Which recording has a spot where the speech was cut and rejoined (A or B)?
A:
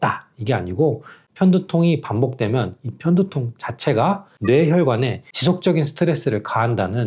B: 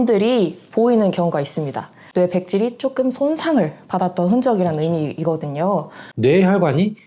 B